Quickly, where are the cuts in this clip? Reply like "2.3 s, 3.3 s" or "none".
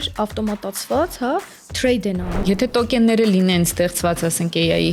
2.4 s

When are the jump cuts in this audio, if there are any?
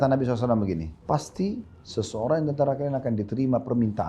0.9 s

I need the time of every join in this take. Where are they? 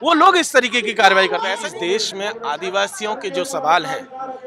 1.6 s

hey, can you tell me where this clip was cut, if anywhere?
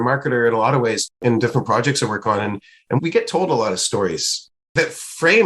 1.1 s, 4.7 s

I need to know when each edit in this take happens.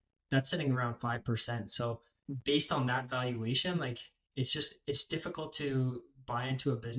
2.1 s

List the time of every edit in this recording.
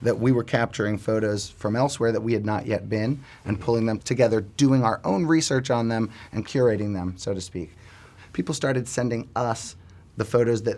4.0 s, 6.4 s, 8.0 s

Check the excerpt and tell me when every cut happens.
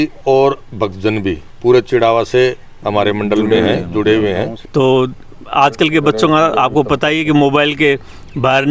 4.6 s

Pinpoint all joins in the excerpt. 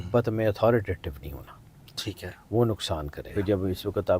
3.3 s

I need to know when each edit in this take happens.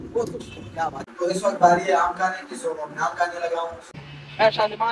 1.0 s, 3.8 s

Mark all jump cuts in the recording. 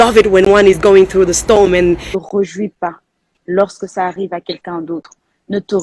2.1 s

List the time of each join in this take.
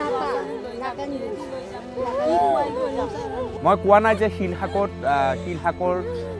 3.4 s

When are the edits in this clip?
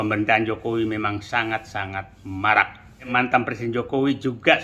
3.1 s

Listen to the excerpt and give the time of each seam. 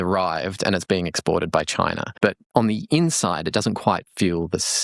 2.0 s

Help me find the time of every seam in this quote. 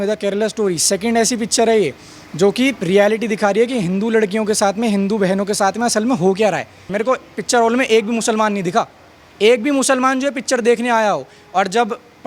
6.9 s

